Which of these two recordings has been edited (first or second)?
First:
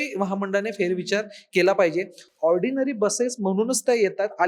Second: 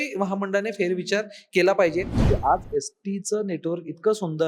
second